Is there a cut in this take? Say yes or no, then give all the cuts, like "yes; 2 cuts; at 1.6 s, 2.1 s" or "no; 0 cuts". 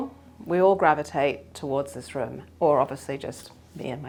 no; 0 cuts